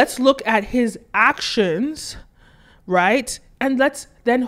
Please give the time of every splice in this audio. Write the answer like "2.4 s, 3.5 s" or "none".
none